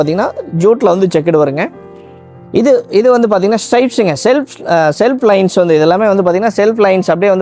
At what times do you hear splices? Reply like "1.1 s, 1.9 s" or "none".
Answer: none